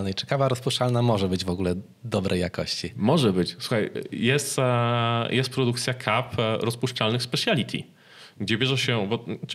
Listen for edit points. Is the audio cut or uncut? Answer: uncut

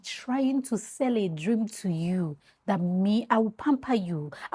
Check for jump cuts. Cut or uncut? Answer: uncut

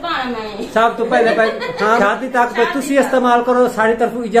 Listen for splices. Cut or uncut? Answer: cut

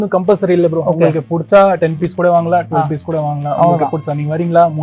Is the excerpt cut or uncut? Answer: uncut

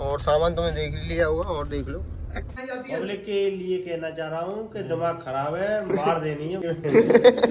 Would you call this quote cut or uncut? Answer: cut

